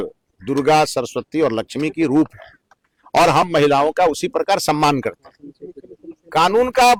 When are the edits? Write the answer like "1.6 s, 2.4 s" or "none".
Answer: none